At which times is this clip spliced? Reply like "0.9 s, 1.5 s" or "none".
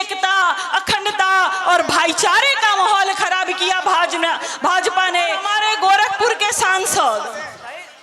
5.4 s

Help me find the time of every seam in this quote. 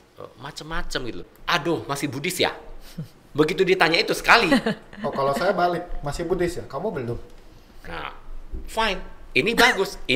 1.3 s

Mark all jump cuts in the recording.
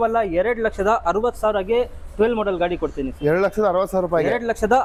none

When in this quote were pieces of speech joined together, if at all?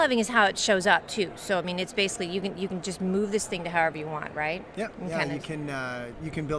none

